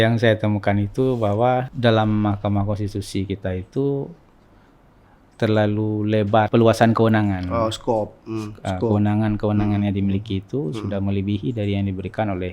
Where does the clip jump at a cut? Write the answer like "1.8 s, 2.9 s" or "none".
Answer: 1.7 s, 6.5 s